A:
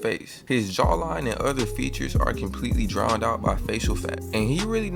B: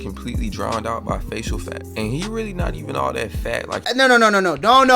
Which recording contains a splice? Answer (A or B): B